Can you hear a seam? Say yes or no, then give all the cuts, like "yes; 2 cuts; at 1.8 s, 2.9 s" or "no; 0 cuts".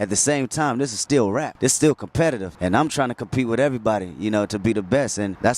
no; 0 cuts